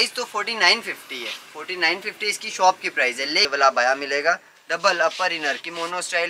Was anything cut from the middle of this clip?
yes; 1 cut; at 3.5 s

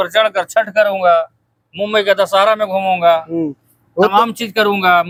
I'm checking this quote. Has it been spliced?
no; 0 cuts

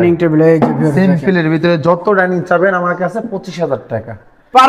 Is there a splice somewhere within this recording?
no; 0 cuts

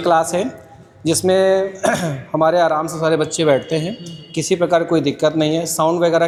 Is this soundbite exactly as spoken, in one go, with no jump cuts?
yes; 0 cuts

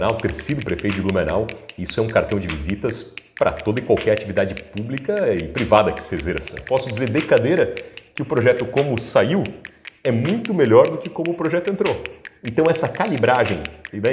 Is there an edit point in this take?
yes; 1 cut; at 6.6 s

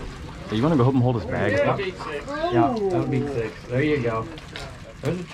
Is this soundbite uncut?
yes; 0 cuts

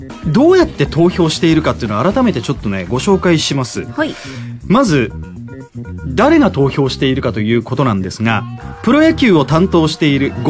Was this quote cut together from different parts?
no; 0 cuts

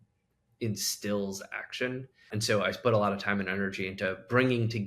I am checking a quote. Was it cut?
yes; 1 cut; at 2.2 s

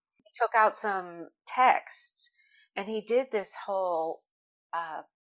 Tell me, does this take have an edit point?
no; 0 cuts

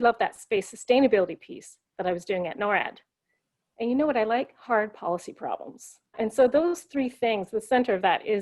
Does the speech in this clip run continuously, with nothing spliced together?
no; 1 cut; at 6.1 s

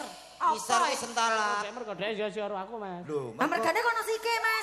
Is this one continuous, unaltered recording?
no; 1 cut; at 1.8 s

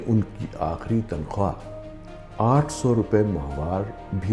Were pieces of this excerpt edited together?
no; 0 cuts

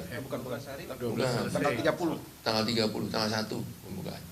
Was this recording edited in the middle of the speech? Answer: no; 0 cuts

